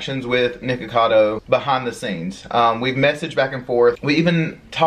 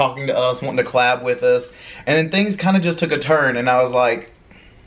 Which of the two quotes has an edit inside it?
first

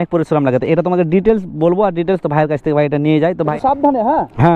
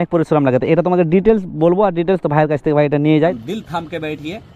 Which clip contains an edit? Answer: second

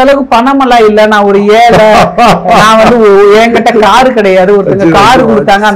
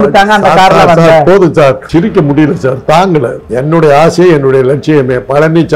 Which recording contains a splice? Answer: second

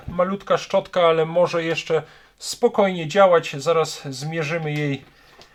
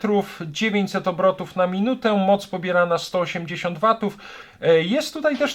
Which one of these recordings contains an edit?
second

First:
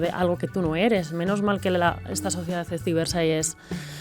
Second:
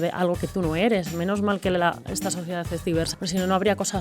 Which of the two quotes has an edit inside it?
second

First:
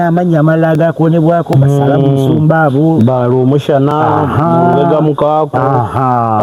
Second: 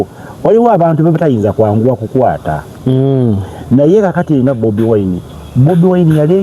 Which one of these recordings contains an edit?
second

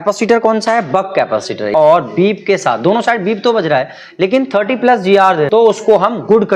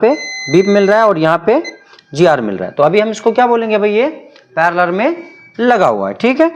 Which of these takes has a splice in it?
first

